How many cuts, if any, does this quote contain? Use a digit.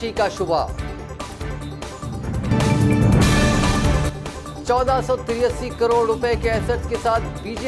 0